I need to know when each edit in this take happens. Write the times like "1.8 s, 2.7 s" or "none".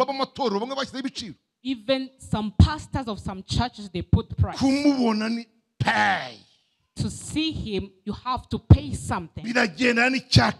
none